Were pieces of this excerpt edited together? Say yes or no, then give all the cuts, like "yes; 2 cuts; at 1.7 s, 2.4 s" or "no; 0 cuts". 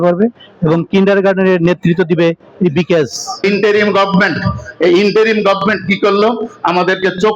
yes; 1 cut; at 3.4 s